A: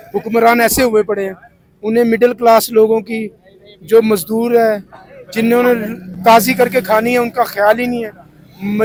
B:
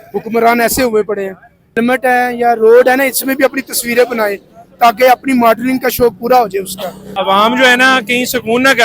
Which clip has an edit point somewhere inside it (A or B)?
B